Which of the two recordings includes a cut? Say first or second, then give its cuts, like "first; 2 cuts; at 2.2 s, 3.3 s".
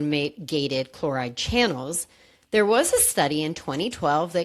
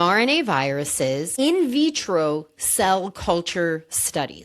second; 1 cut; at 1.3 s